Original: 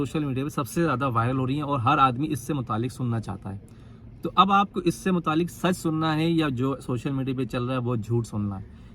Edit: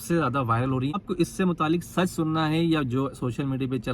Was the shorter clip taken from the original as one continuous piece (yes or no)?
no